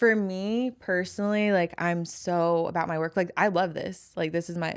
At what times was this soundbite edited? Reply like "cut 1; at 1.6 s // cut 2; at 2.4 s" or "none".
none